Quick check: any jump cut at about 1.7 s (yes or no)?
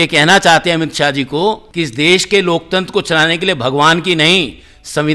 yes